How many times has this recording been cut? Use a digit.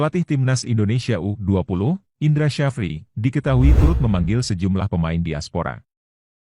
1